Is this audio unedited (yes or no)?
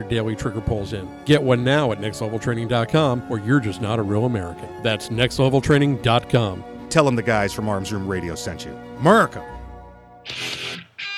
no